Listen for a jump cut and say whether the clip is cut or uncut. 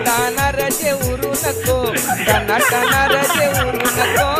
uncut